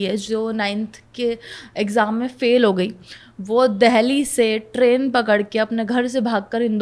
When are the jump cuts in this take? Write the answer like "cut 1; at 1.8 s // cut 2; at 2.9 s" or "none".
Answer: none